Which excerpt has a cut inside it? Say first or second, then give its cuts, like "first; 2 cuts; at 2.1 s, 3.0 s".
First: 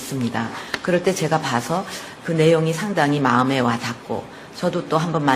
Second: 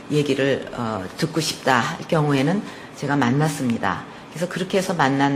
first; 1 cut; at 3.0 s